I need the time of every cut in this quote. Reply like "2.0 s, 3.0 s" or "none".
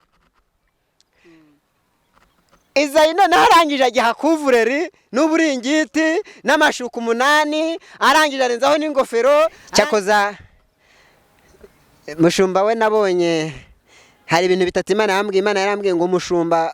9.6 s